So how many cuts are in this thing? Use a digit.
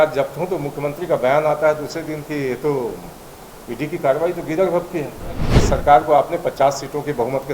1